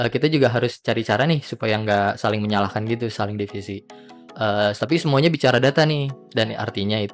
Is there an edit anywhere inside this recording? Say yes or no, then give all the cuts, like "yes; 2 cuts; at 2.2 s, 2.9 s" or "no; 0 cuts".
no; 0 cuts